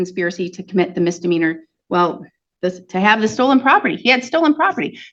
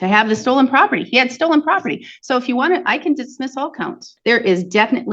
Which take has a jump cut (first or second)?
second